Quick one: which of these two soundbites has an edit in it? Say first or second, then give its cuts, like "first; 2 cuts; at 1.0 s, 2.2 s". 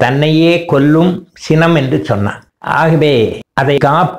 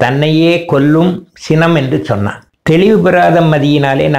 second; 1 cut; at 2.5 s